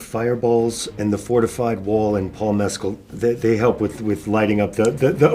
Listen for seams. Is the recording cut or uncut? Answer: cut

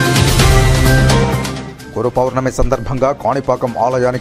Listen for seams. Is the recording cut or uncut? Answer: cut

